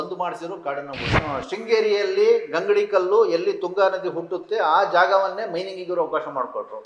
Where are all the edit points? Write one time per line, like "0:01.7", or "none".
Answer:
0:01.2